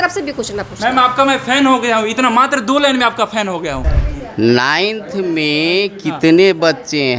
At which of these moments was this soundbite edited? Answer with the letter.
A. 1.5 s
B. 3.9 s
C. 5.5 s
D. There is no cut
B